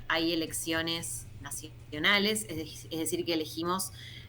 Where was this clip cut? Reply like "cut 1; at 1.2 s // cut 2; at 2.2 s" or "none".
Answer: none